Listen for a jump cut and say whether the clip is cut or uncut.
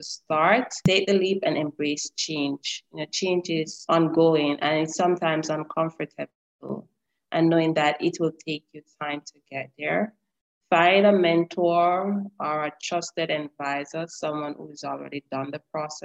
cut